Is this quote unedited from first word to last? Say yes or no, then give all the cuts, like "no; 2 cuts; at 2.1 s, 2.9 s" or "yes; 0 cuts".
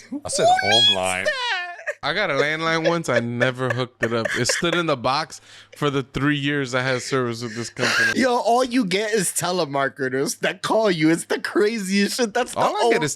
no; 2 cuts; at 2.0 s, 8.0 s